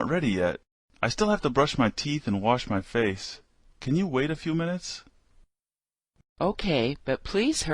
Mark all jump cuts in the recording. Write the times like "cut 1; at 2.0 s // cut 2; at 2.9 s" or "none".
cut 1; at 6.3 s